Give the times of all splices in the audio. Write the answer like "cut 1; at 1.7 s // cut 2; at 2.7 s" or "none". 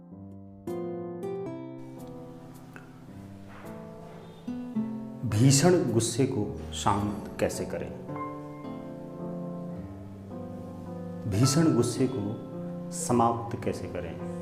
cut 1; at 1.5 s